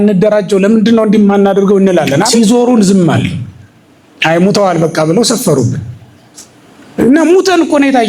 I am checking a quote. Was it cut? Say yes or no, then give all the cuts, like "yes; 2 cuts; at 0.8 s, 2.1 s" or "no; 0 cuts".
yes; 1 cut; at 2.3 s